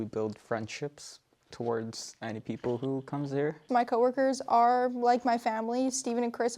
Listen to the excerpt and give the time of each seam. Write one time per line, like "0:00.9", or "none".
0:03.6